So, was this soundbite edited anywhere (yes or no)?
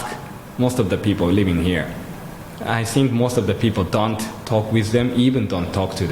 no